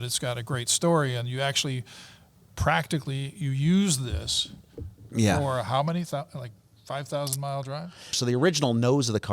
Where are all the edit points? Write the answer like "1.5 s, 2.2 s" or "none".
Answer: 8.2 s